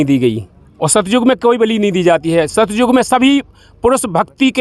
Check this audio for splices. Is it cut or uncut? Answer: uncut